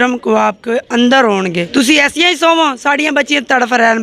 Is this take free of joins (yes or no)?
no